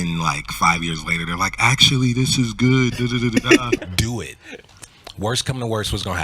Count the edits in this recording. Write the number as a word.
one